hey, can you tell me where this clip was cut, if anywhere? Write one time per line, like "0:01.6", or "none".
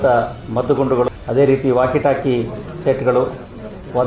0:01.1